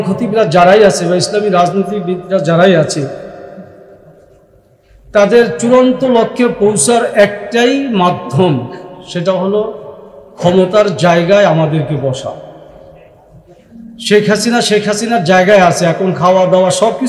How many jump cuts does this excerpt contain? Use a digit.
0